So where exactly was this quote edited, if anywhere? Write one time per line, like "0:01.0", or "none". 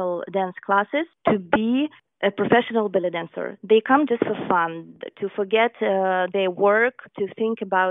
0:01.1
0:02.0
0:07.1